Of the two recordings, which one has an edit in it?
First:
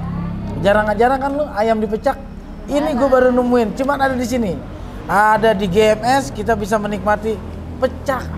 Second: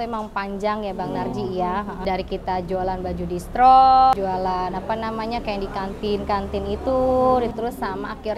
second; 3 cuts; at 2.0 s, 4.1 s, 7.5 s

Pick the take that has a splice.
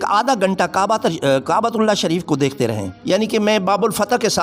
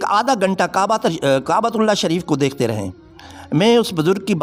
first; 1 cut; at 2.9 s

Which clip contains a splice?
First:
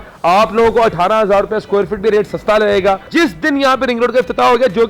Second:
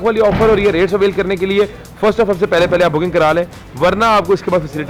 first; 1 cut; at 3.1 s

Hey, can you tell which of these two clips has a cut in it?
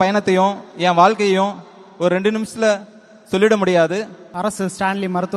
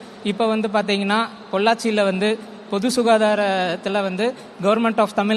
first; 1 cut; at 4.2 s

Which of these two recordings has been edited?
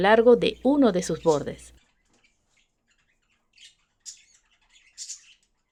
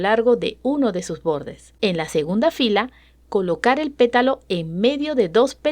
second; 1 cut; at 1.6 s

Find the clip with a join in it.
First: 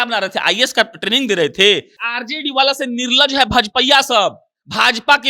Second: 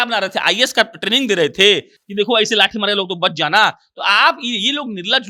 first; 1 cut; at 2.0 s

